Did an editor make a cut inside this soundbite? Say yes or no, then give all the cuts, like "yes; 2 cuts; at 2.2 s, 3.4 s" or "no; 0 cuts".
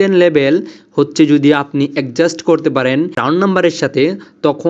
yes; 1 cut; at 3.2 s